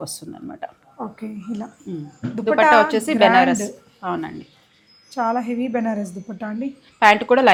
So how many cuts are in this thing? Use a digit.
0